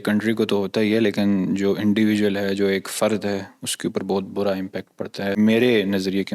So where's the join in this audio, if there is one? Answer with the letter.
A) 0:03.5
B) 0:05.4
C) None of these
B